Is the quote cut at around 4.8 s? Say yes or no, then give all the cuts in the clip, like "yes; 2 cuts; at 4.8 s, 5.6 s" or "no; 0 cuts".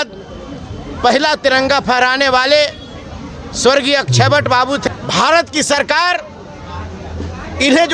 yes; 1 cut; at 4.8 s